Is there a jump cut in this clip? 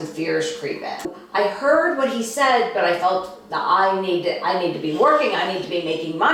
yes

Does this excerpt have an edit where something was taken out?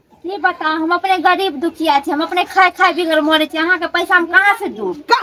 no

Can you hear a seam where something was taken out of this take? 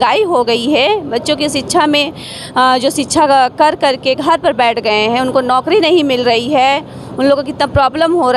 no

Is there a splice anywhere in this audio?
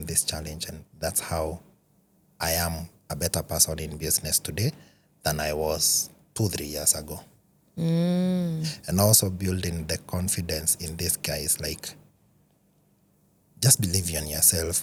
no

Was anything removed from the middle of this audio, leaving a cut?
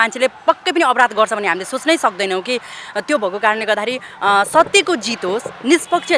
no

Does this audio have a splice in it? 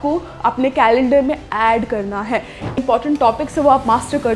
yes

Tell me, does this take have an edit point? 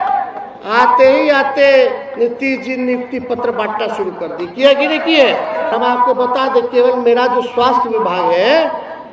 yes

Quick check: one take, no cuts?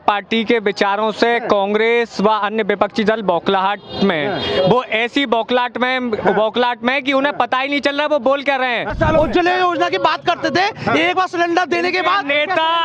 no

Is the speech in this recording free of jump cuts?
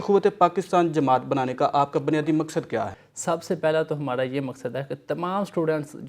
no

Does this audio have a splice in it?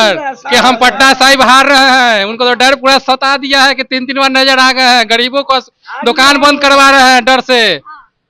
no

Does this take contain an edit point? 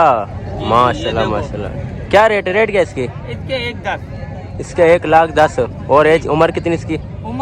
no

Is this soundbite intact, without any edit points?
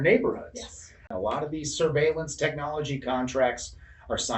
no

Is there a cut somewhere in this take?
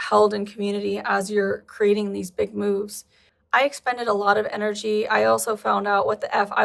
no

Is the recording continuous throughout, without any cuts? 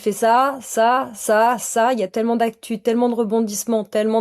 yes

